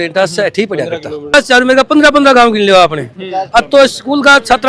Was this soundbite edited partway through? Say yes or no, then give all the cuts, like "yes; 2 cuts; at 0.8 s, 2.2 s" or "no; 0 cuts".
yes; 1 cut; at 1.3 s